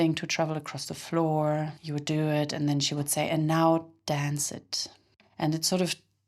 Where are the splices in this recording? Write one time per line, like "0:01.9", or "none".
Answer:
0:01.8
0:05.2